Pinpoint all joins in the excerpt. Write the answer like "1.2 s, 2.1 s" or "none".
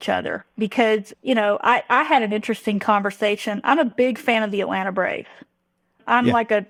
none